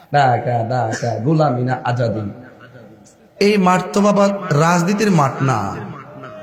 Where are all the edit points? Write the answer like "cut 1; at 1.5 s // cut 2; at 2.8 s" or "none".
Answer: none